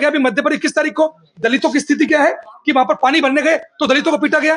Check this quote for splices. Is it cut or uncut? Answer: uncut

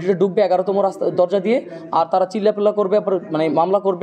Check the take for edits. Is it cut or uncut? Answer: uncut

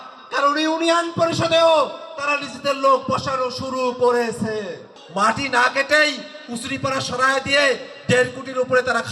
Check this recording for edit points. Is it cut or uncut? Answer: cut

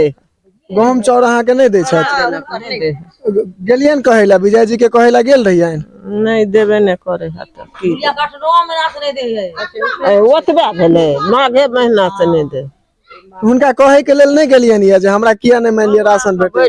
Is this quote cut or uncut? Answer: uncut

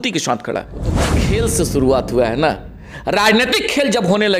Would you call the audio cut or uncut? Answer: cut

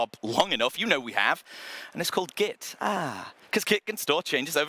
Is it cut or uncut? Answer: uncut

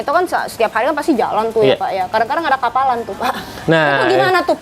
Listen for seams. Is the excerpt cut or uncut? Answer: uncut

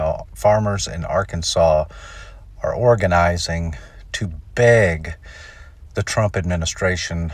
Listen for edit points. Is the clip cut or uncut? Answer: uncut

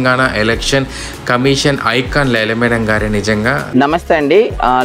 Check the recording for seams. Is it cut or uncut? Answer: cut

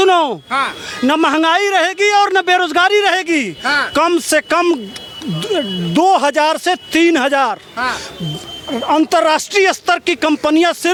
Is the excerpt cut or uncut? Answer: uncut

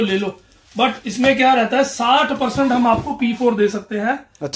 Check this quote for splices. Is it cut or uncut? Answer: uncut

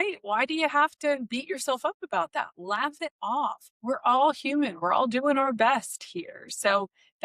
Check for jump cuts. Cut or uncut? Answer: cut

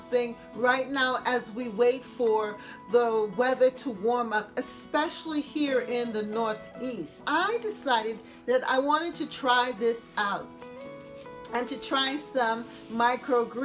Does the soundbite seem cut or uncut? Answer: cut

